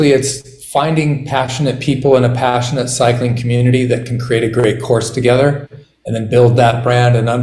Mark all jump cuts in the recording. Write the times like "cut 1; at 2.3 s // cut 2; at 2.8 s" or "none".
none